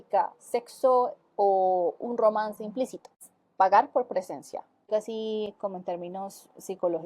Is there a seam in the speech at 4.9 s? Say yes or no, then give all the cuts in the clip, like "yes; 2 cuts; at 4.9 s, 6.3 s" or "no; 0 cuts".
yes; 1 cut; at 4.9 s